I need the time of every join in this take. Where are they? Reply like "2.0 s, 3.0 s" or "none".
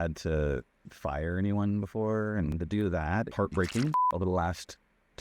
2.5 s, 4.0 s